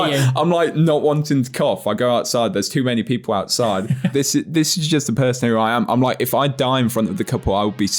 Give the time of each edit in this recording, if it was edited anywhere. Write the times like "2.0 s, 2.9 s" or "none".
4.1 s